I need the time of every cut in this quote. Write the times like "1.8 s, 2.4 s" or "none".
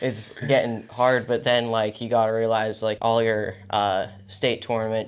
3.0 s